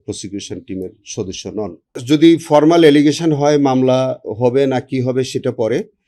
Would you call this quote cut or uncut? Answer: cut